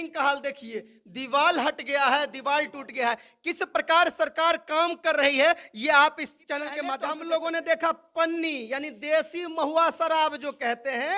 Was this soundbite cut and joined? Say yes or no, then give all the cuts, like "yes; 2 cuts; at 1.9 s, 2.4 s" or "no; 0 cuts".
yes; 1 cut; at 6.9 s